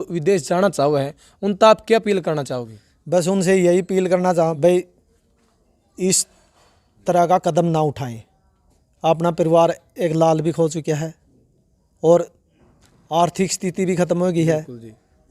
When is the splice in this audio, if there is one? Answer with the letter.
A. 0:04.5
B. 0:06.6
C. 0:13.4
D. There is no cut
A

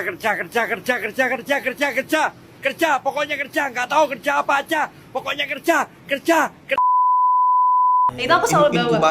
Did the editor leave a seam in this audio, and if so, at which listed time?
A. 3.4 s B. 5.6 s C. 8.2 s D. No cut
C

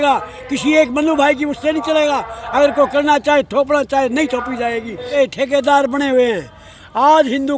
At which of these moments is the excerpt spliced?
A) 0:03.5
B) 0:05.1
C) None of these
B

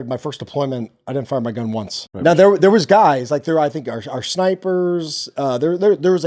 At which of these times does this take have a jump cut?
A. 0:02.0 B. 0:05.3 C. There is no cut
A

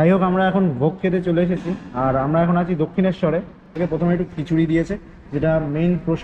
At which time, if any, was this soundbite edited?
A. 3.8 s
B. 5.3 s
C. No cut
A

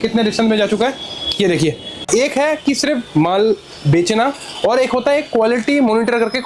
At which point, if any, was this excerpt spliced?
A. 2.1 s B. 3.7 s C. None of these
A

